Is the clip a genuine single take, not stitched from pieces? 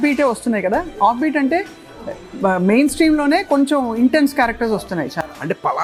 yes; 0 cuts

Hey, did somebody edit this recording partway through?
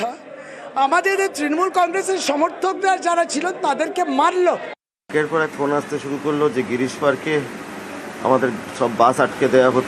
yes; 1 cut; at 5.0 s

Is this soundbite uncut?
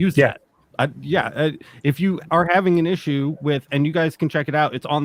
yes; 0 cuts

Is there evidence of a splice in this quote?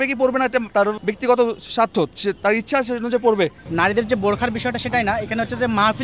yes; 2 cuts; at 0.8 s, 3.6 s

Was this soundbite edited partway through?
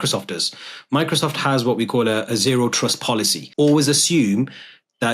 yes; 1 cut; at 3.4 s

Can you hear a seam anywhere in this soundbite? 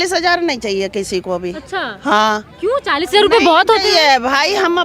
no; 0 cuts

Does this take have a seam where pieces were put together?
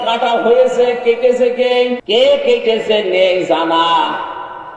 yes; 1 cut; at 2.0 s

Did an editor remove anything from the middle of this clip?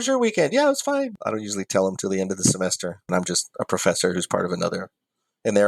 yes; 2 cuts; at 1.2 s, 3.1 s

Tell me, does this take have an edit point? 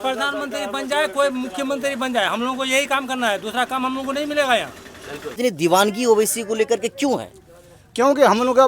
yes; 1 cut; at 5.3 s

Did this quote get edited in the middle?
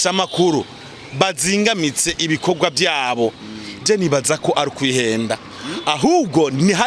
no; 0 cuts

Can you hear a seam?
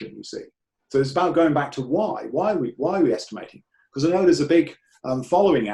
no; 0 cuts

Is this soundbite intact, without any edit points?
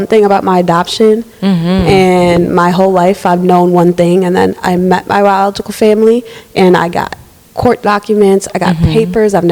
yes; 0 cuts

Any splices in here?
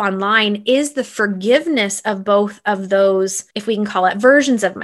yes; 1 cut; at 3.5 s

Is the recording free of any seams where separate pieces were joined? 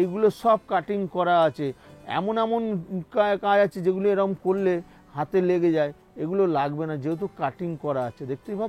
yes; 0 cuts

